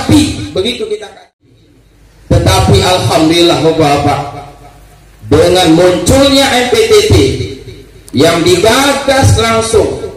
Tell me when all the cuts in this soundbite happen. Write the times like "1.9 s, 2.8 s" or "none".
1.4 s